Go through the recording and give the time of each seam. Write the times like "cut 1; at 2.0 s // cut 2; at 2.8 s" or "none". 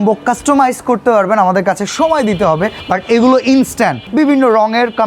cut 1; at 2.8 s // cut 2; at 4.0 s